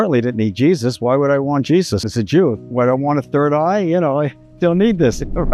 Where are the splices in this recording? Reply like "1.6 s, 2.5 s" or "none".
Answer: 2.1 s, 4.4 s